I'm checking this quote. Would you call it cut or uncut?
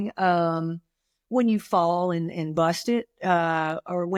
uncut